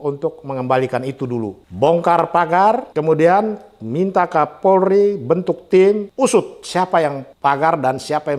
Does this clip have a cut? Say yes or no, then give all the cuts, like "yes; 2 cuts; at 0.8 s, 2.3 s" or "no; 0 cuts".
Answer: yes; 4 cuts; at 1.6 s, 2.9 s, 6.1 s, 7.3 s